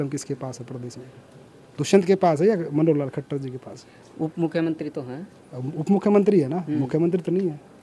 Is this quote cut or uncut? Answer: uncut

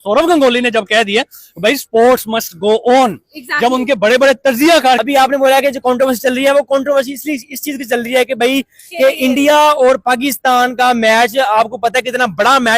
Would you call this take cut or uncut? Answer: cut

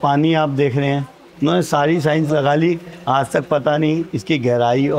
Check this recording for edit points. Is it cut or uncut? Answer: cut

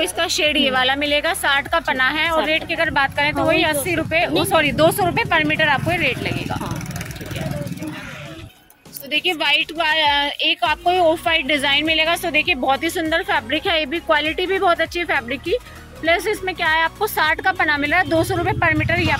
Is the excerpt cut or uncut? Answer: uncut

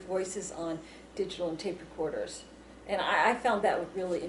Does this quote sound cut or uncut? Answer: cut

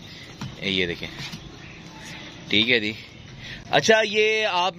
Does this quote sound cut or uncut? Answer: uncut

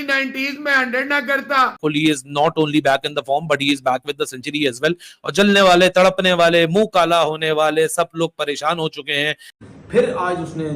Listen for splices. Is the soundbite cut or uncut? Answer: cut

